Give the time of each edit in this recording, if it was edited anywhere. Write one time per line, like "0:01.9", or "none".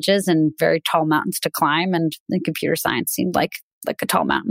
none